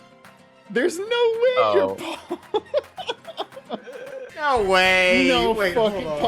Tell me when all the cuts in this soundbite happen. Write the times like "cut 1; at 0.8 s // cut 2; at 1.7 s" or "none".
cut 1; at 4.3 s